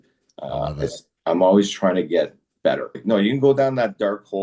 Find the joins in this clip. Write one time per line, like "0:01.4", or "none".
0:03.0